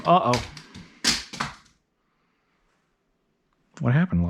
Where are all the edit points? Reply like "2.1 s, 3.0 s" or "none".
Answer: none